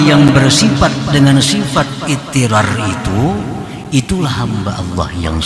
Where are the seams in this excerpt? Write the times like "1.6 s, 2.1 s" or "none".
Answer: none